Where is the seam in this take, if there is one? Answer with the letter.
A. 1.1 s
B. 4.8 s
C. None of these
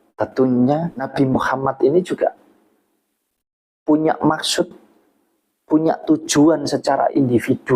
A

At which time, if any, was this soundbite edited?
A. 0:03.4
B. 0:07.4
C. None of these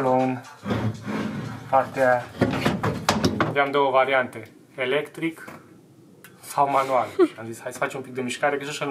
A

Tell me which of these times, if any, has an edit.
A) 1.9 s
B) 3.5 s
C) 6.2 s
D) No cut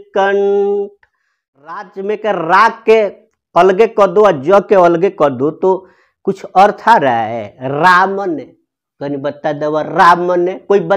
A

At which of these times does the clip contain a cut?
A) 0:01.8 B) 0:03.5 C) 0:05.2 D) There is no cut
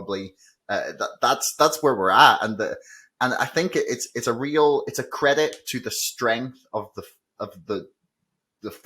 D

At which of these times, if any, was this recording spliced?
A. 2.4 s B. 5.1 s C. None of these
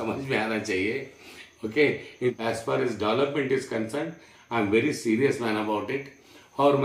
A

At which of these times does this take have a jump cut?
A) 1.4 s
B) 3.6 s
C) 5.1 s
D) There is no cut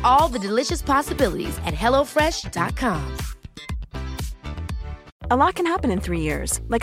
C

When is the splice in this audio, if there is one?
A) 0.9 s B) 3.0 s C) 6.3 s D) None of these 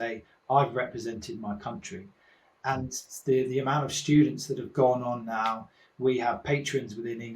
D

